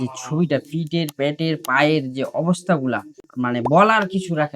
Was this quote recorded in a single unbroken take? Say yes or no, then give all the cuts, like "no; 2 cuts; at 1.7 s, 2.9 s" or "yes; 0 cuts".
yes; 0 cuts